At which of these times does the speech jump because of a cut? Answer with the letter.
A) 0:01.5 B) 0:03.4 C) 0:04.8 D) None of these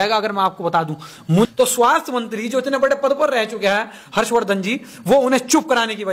A